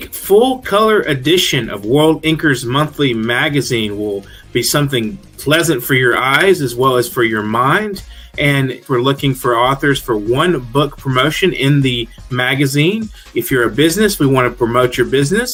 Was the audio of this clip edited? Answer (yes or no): no